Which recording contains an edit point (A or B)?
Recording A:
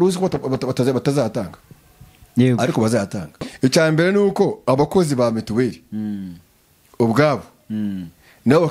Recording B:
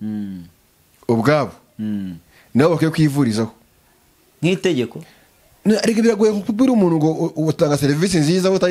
A